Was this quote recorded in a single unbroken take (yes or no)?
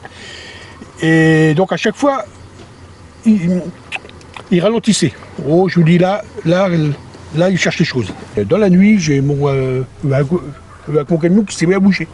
no